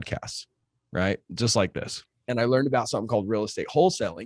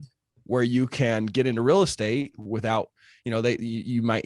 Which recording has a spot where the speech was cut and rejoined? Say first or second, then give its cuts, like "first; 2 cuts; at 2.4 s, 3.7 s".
first; 1 cut; at 2.2 s